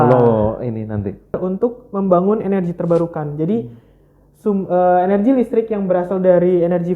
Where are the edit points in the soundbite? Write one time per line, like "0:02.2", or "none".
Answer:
0:01.4